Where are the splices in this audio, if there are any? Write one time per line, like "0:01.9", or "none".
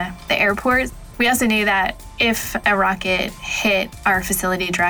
0:01.0
0:02.0